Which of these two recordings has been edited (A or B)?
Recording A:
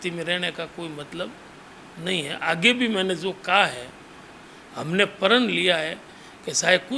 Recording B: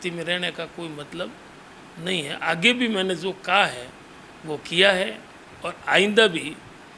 A